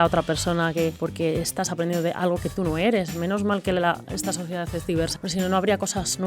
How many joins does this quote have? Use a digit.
2